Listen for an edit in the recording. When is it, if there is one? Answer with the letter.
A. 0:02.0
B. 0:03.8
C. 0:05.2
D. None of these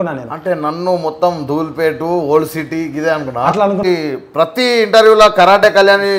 B